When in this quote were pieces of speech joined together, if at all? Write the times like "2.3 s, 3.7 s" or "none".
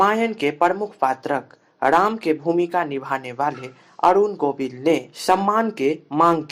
5.1 s